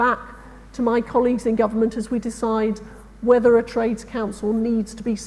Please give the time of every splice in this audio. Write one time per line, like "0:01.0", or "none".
none